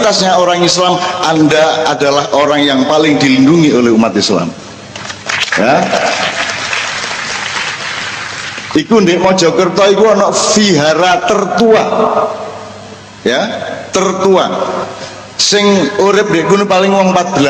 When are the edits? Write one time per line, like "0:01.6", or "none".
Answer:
none